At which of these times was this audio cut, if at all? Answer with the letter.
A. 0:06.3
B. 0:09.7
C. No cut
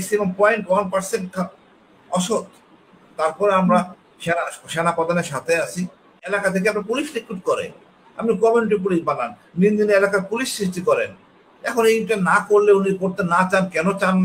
A